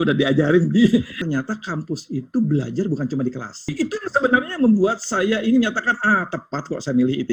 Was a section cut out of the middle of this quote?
yes; 2 cuts; at 1.1 s, 3.7 s

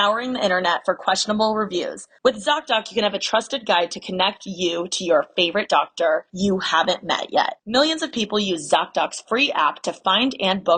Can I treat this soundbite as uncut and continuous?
yes; 0 cuts

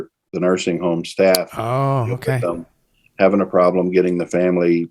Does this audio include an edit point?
no; 0 cuts

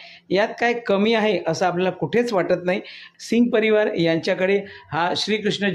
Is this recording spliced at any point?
yes; 1 cut; at 3.0 s

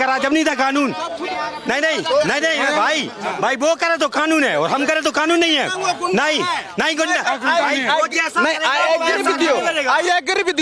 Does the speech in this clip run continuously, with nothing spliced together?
yes; 0 cuts

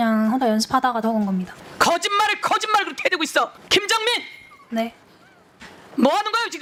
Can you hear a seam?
no; 0 cuts

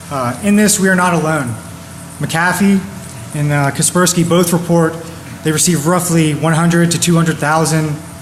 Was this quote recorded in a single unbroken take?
no; 1 cut; at 1.1 s

